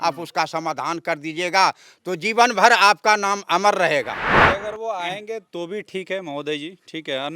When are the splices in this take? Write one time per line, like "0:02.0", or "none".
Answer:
0:04.4